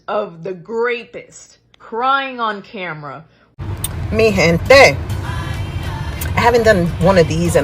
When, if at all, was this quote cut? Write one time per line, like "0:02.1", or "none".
0:03.5